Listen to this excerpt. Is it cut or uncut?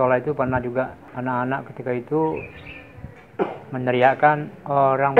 cut